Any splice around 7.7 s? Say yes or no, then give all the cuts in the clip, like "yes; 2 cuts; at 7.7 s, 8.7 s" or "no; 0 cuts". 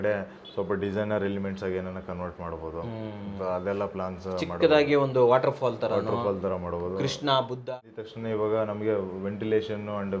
yes; 1 cut; at 7.7 s